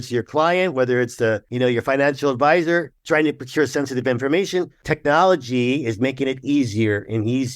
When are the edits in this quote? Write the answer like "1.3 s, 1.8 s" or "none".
1.5 s, 2.9 s, 4.8 s